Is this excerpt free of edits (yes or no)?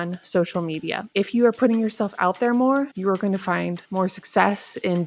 no